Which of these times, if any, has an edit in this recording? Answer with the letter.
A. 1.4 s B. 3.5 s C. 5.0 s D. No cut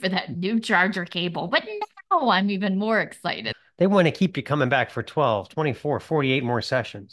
B